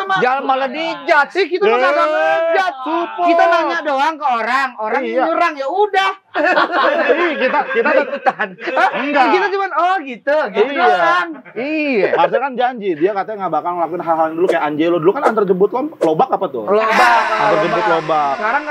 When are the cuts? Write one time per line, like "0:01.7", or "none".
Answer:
none